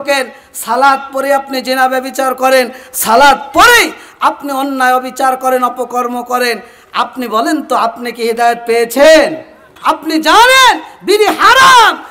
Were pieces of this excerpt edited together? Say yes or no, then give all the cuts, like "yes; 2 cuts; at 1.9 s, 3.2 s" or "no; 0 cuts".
yes; 1 cut; at 9.7 s